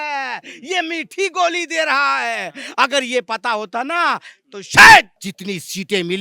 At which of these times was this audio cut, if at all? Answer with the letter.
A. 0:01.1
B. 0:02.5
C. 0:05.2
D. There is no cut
C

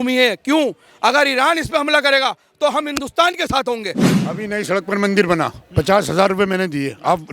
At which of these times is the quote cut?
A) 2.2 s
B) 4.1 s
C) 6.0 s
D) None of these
B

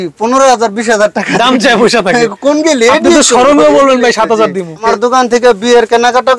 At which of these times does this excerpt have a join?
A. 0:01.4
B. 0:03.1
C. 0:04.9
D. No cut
C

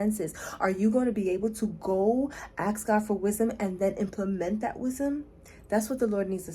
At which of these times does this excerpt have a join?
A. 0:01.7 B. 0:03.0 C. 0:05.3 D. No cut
D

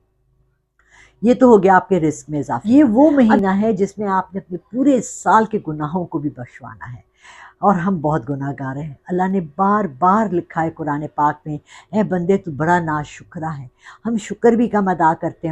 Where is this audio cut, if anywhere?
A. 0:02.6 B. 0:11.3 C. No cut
A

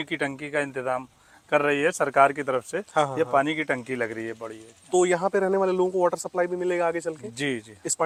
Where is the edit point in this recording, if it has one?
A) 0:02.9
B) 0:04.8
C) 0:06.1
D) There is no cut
D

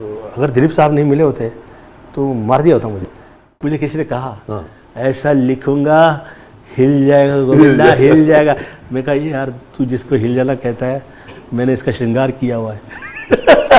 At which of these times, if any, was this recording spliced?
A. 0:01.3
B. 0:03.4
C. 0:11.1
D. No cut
B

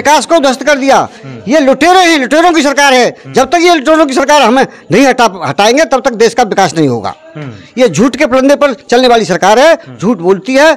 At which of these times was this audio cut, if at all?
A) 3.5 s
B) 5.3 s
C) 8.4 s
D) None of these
D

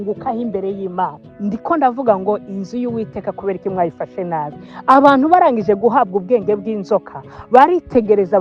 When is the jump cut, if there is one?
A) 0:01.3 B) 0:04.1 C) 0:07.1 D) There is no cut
A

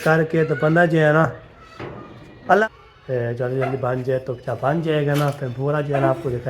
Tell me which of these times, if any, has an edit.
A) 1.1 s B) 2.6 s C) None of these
B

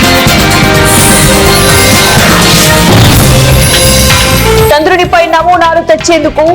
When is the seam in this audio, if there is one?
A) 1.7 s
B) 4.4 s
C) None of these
B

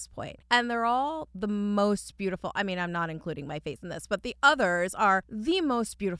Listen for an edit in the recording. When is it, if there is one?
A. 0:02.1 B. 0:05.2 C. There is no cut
C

